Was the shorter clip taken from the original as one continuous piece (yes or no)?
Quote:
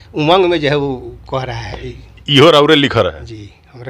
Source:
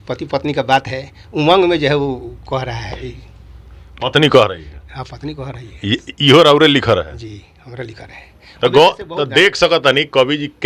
no